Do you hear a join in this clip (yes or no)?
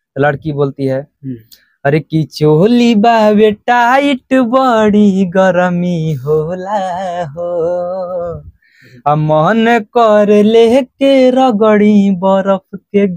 no